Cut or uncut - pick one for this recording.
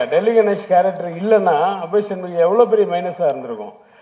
uncut